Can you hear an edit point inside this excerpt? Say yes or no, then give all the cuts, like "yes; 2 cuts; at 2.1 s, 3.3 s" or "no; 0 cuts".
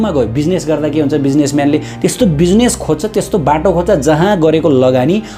no; 0 cuts